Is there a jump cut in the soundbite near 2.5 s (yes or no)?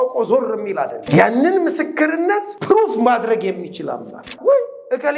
yes